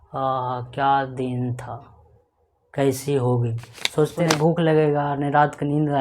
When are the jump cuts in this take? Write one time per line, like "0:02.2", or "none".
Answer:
0:04.1